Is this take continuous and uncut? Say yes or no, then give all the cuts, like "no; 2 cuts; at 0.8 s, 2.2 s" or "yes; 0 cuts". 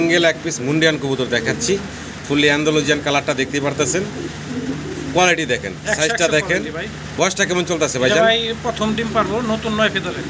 yes; 0 cuts